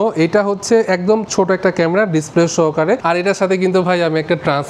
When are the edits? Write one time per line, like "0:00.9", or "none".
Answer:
0:03.0